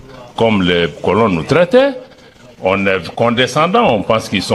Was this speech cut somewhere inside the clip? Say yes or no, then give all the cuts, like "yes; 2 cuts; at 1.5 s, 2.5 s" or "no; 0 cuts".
no; 0 cuts